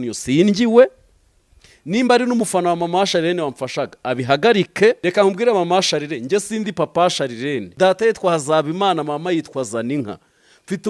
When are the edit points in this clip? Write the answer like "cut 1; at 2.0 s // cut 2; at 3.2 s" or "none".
cut 1; at 5.0 s // cut 2; at 7.7 s